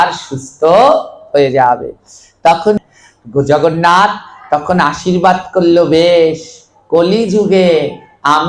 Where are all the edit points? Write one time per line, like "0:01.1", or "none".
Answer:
0:02.8